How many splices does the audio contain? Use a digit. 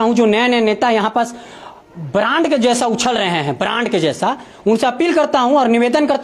0